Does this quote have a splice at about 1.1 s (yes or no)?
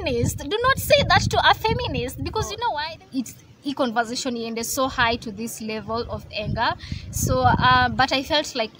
no